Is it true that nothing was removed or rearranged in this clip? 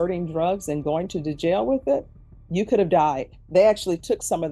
no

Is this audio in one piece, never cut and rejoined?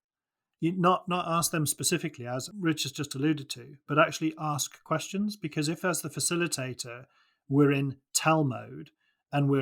no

